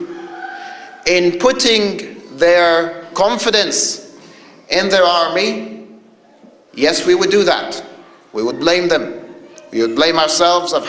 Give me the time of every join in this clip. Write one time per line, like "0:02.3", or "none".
0:08.4